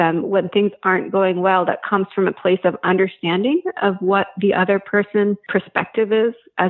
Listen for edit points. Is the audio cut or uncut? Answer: cut